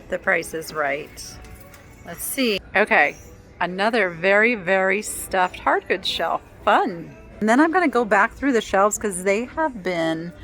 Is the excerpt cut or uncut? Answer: cut